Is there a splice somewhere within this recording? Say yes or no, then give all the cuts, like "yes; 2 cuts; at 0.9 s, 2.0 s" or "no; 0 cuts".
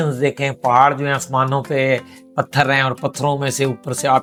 no; 0 cuts